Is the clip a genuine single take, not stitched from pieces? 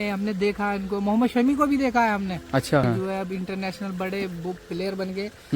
no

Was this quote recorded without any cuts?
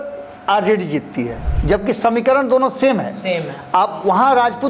no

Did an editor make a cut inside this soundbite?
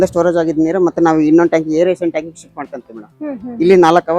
no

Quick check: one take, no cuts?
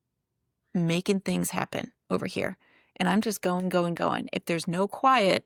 yes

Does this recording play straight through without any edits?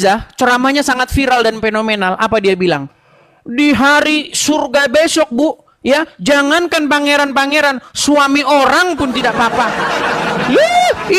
yes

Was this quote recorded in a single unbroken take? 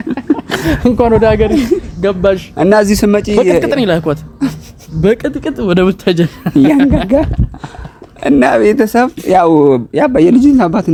yes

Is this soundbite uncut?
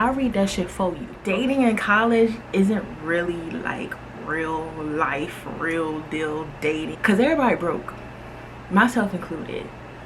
no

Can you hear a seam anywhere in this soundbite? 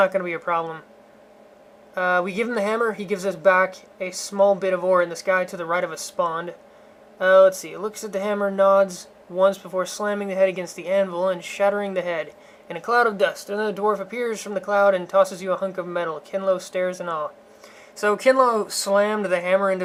no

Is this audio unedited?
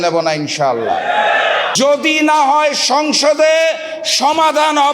no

